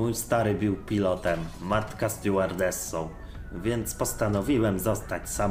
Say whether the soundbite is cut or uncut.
uncut